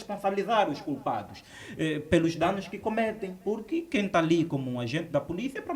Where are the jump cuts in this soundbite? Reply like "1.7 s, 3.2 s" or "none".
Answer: none

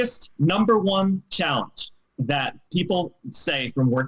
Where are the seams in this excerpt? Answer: none

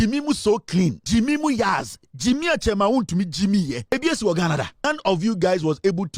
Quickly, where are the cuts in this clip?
1.0 s, 3.9 s, 4.9 s

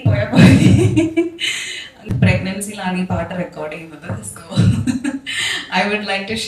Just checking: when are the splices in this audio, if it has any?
2.1 s

